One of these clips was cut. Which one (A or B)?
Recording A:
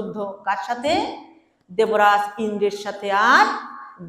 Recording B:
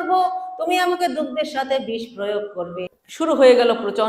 B